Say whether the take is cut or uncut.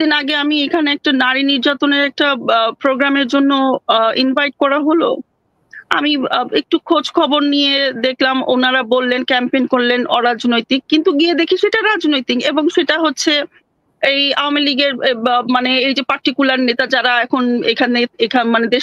uncut